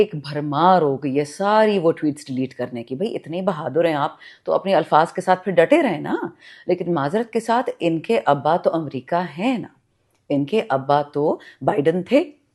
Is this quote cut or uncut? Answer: uncut